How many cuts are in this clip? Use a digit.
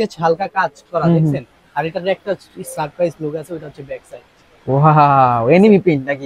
0